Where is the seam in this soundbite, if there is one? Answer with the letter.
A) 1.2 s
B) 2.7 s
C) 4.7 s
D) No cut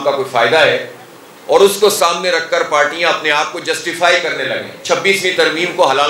C